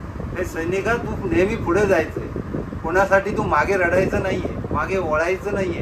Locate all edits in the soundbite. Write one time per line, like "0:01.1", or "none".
none